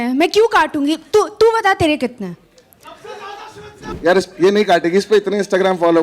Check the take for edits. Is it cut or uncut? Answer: cut